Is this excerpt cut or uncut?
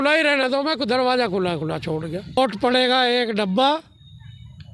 cut